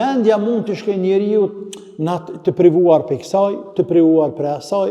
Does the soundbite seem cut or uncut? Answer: uncut